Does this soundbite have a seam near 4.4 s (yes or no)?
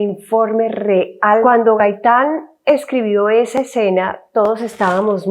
no